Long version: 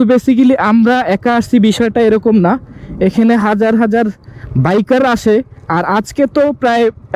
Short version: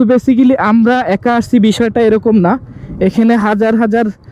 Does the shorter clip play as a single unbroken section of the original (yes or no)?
yes